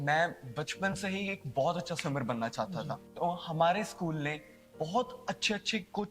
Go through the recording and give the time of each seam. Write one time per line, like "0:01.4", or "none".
0:03.0